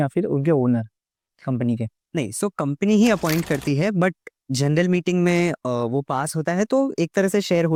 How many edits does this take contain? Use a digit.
0